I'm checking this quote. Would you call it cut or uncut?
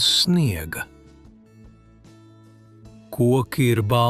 uncut